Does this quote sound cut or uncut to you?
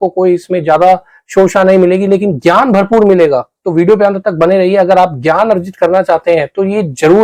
uncut